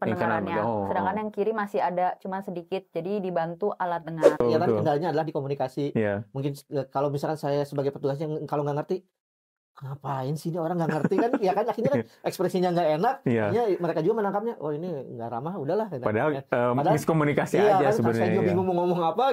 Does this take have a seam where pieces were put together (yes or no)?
yes